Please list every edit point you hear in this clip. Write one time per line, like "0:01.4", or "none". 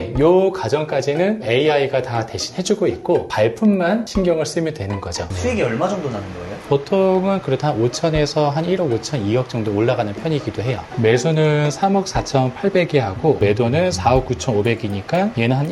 0:03.3
0:05.2
0:06.6
0:10.8